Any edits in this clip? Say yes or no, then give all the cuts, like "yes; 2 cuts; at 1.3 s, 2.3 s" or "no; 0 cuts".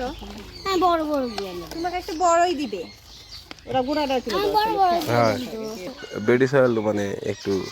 yes; 1 cut; at 6.0 s